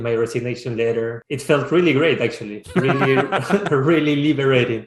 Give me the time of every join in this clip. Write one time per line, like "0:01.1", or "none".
0:01.3